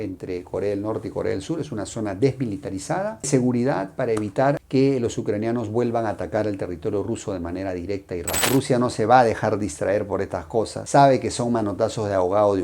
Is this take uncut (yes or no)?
no